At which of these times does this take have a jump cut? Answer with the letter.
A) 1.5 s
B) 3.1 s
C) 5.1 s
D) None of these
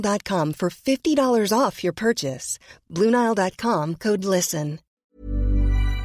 C